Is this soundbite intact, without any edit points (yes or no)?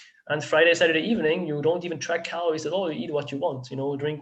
yes